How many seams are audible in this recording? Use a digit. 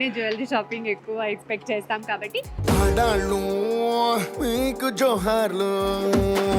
0